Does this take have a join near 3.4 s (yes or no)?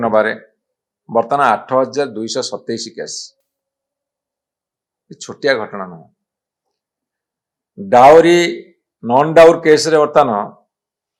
no